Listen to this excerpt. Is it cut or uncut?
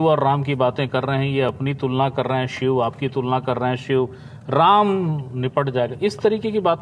uncut